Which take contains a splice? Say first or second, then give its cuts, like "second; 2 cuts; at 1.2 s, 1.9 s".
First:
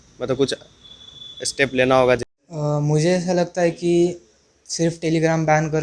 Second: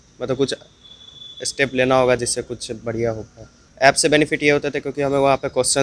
first; 1 cut; at 2.3 s